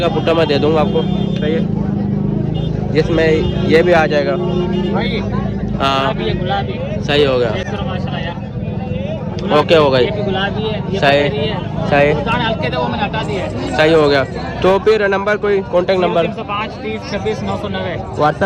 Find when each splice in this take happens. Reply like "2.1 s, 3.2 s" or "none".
none